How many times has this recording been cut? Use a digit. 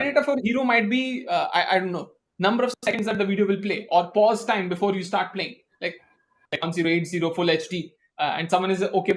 1